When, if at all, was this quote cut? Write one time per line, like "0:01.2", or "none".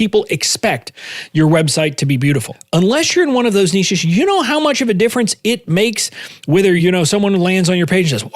0:02.5
0:06.8